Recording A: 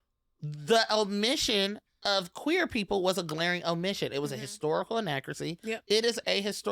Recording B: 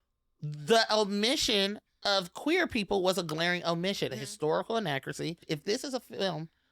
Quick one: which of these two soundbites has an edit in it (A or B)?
B